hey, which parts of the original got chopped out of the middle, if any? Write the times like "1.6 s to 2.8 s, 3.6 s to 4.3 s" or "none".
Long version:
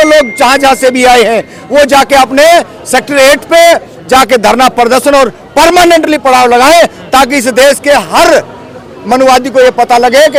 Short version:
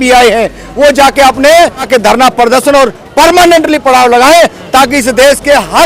2.8 s to 4.3 s